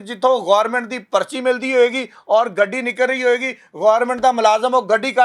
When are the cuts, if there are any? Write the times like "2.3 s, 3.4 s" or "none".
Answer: none